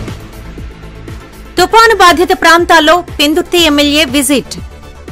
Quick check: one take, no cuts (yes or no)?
yes